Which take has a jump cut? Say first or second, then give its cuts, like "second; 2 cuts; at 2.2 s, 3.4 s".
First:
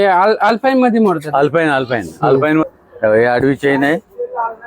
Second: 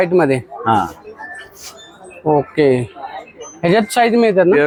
first; 1 cut; at 2.6 s